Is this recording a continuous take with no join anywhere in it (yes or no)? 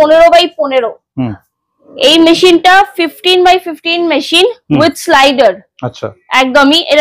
yes